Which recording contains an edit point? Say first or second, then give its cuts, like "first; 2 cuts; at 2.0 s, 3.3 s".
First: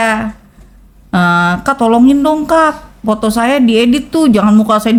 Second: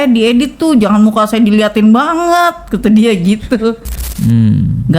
second; 1 cut; at 4.1 s